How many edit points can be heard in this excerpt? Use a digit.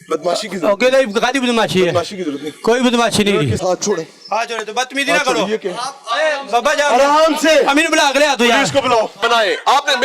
2